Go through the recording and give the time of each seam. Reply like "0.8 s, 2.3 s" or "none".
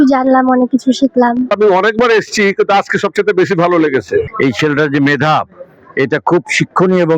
1.5 s, 4.3 s